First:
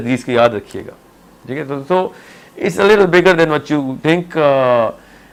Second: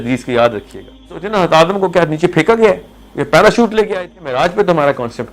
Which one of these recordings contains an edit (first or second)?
second